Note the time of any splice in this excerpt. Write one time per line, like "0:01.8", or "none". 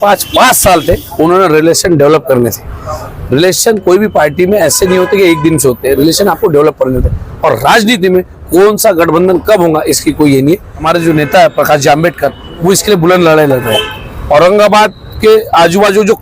0:10.9